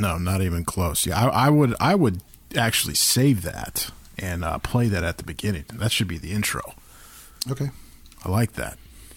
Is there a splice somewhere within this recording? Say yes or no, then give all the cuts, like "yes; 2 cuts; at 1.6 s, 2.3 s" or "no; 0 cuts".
no; 0 cuts